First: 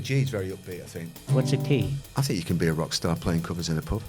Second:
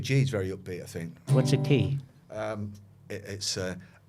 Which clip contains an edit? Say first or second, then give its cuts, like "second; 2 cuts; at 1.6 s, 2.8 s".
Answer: first; 1 cut; at 2.0 s